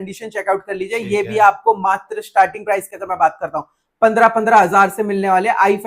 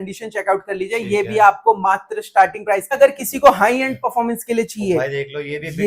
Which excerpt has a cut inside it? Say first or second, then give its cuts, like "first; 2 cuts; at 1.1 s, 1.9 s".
second; 1 cut; at 2.9 s